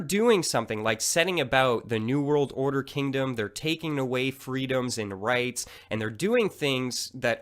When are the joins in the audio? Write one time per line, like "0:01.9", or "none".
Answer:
0:03.5